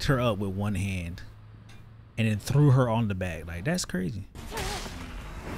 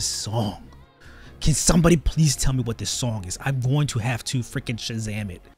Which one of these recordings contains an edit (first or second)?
first